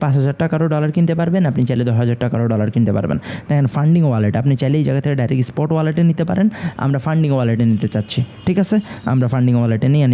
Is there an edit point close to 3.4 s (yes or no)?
no